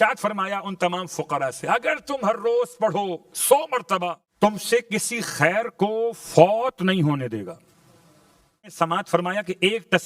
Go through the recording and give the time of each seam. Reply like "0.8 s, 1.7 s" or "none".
4.2 s, 8.6 s